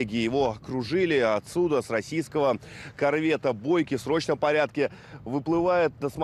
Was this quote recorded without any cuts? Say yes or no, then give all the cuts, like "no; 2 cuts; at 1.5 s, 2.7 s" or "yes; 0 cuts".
yes; 0 cuts